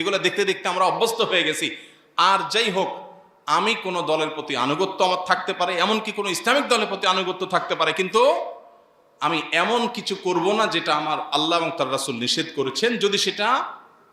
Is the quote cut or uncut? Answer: uncut